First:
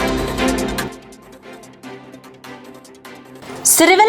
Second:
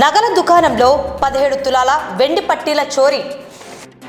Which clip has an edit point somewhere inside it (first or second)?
first